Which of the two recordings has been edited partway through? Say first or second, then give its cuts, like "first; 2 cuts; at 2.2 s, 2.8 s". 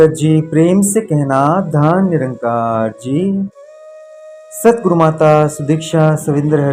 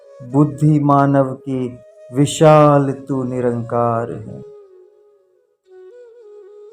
second; 1 cut; at 4.2 s